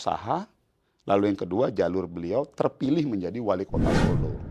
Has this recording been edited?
no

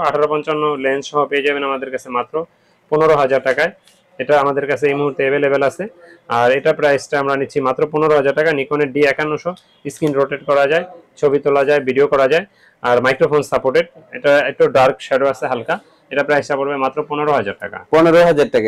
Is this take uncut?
yes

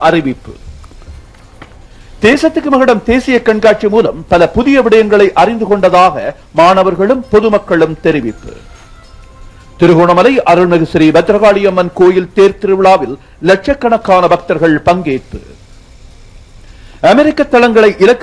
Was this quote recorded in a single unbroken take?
yes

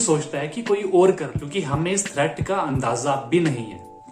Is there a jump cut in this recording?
yes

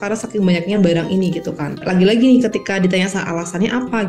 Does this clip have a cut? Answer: yes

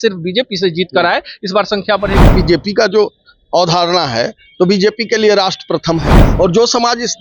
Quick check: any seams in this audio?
yes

